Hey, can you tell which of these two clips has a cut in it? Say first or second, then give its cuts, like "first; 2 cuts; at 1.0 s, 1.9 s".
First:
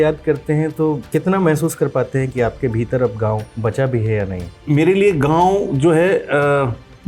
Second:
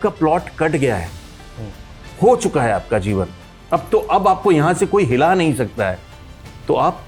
first; 3 cuts; at 1.0 s, 3.5 s, 4.5 s